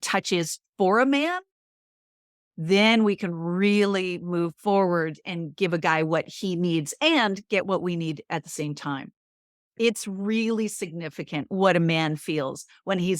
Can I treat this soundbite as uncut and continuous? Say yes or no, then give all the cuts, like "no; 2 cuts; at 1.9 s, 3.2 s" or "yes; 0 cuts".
no; 1 cut; at 9.6 s